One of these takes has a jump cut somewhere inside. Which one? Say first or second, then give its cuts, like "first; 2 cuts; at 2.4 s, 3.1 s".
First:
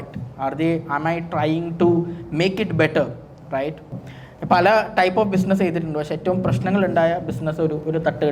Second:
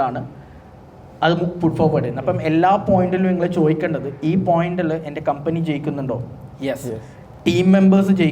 first; 1 cut; at 4.0 s